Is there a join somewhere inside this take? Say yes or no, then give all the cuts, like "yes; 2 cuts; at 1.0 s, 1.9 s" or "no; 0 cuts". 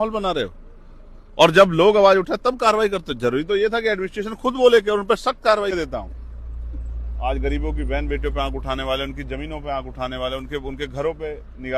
yes; 1 cut; at 5.7 s